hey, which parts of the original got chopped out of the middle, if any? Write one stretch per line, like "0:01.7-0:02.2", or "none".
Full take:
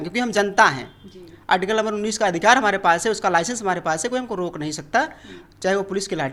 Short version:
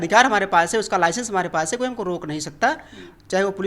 none

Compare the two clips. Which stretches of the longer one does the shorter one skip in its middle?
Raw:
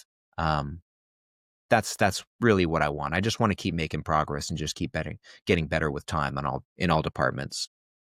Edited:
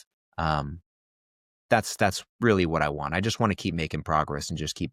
none

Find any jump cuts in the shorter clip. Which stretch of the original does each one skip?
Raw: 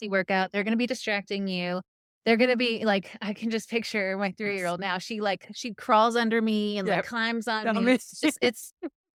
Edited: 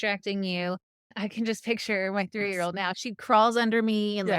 0:02.1-0:03.1
0:05.0-0:05.5

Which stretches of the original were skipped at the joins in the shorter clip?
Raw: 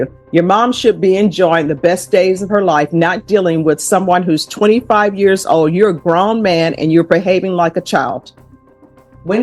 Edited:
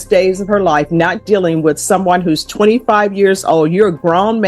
none

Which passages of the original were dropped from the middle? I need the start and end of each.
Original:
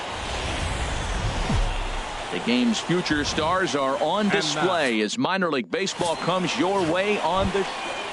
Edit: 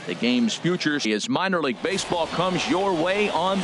0:03.3-0:04.9

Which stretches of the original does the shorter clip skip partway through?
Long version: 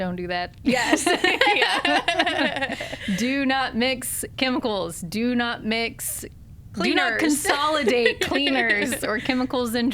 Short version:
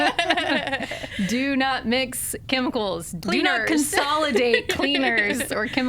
0:05.0-0:06.6

